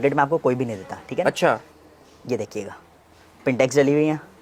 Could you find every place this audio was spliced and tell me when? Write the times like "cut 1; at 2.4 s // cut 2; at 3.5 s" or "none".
none